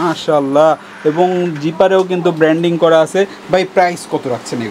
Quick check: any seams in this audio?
no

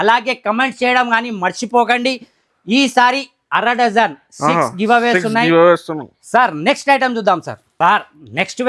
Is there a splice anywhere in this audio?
no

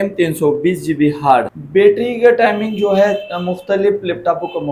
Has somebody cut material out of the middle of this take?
yes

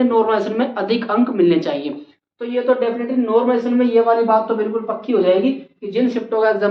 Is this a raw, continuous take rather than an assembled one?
yes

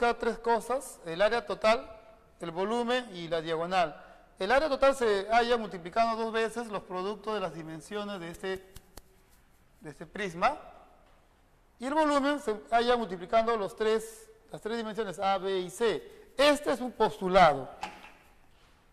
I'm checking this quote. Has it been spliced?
no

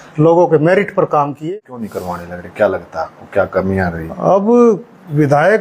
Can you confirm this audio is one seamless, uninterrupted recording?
no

